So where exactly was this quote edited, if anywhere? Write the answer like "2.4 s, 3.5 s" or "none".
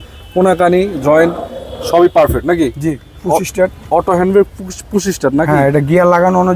3.0 s